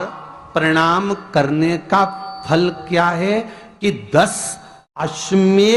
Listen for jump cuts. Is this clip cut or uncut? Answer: uncut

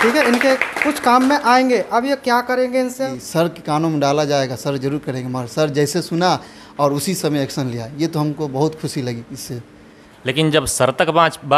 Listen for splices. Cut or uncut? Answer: cut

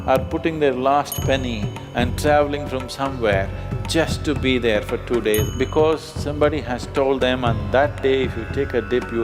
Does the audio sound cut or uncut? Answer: uncut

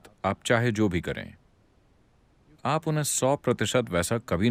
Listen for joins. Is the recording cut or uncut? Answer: uncut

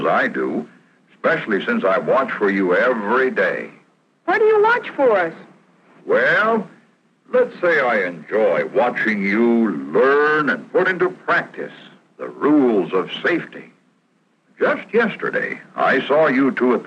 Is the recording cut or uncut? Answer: cut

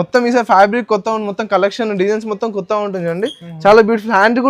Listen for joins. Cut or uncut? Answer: uncut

